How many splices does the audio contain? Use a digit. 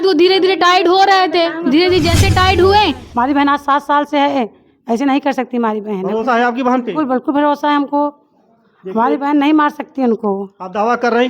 1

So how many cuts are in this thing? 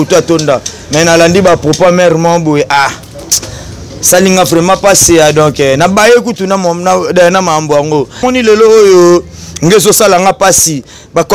1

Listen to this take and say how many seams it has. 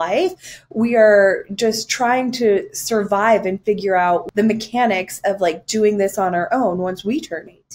1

